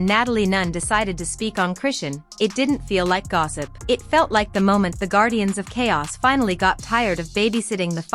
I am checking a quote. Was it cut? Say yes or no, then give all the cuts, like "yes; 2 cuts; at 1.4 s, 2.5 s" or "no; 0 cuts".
no; 0 cuts